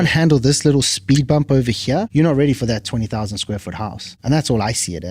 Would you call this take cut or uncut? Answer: cut